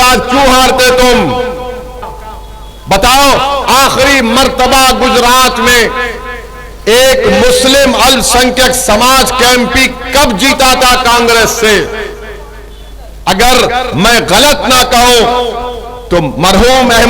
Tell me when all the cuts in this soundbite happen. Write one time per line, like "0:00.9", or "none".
0:01.9